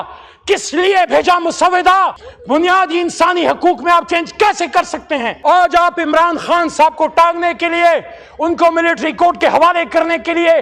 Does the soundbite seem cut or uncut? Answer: cut